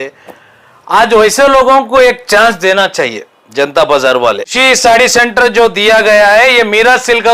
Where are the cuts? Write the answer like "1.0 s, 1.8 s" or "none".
4.5 s